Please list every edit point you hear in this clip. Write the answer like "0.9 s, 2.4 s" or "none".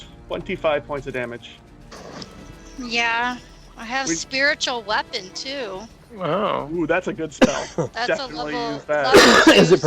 1.9 s